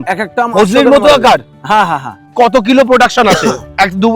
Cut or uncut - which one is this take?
cut